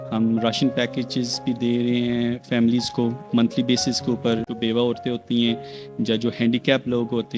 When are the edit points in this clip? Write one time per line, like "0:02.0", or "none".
0:04.5